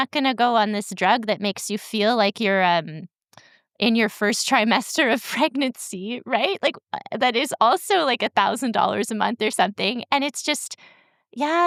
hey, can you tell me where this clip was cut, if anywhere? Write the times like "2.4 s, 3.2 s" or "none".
none